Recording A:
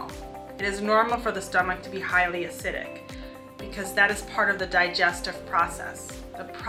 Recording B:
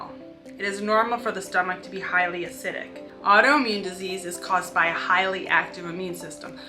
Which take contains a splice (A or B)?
B